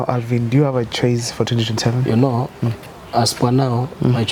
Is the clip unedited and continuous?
yes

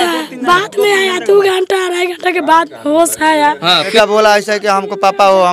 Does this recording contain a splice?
yes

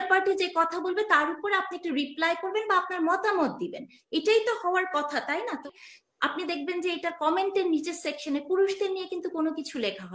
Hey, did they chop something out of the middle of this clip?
yes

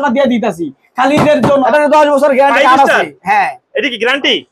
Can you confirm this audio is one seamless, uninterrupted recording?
no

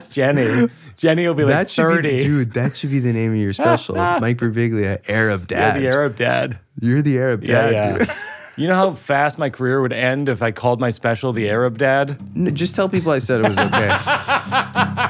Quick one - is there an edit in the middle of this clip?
no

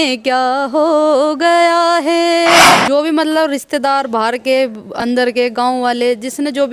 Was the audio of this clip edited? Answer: yes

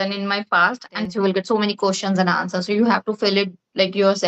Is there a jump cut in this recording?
yes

